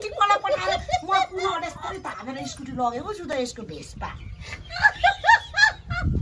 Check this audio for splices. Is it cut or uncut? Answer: uncut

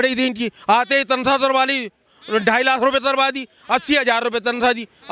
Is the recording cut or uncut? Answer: uncut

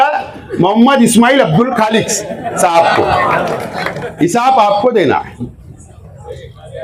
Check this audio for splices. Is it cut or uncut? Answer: uncut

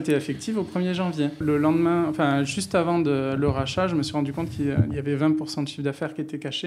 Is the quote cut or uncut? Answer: cut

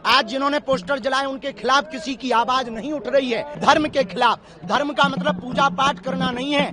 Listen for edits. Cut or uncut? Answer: cut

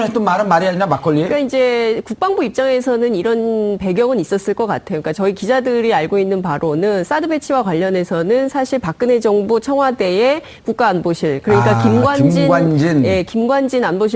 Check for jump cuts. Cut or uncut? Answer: uncut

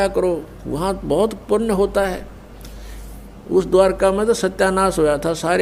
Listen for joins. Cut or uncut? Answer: uncut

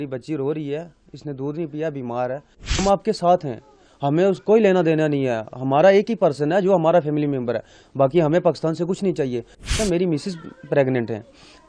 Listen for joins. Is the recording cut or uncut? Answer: cut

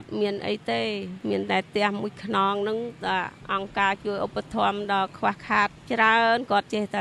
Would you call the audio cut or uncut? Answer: uncut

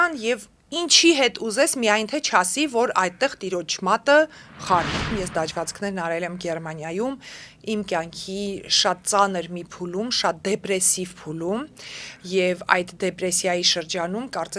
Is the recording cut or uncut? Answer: cut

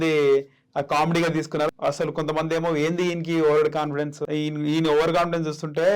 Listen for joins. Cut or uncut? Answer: cut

